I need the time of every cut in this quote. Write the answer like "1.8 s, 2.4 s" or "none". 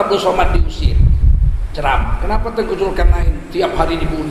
none